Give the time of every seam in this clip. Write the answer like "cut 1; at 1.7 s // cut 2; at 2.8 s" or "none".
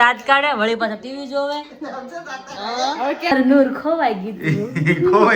cut 1; at 3.3 s